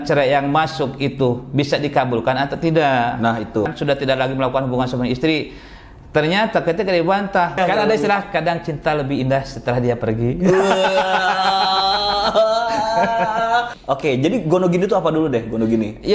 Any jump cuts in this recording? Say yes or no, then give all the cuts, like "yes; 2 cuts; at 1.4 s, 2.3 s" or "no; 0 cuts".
yes; 3 cuts; at 3.7 s, 7.6 s, 13.7 s